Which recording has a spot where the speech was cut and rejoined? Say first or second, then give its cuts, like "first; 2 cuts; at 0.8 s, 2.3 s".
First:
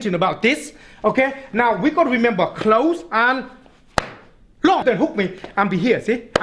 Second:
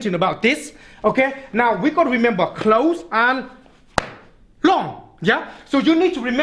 first; 1 cut; at 4.8 s